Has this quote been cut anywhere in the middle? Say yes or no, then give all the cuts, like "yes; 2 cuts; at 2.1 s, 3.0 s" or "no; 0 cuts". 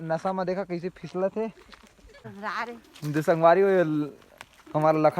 yes; 1 cut; at 2.0 s